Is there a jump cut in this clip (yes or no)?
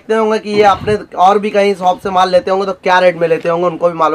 no